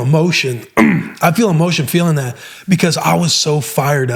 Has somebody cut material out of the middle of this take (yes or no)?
no